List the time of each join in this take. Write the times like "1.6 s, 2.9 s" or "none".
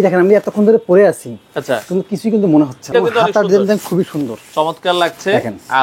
2.9 s